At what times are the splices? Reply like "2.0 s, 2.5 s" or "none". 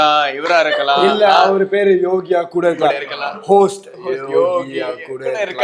none